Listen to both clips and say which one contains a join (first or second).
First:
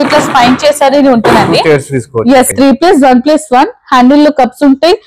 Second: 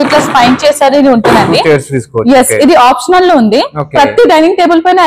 first